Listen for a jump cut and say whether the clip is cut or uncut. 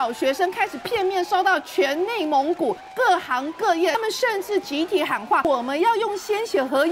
cut